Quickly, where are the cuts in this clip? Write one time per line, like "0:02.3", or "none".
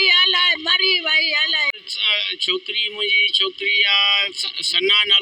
0:01.7